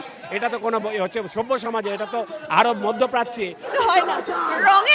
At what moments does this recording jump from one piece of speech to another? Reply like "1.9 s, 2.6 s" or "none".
3.7 s